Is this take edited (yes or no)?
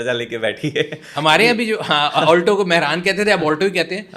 no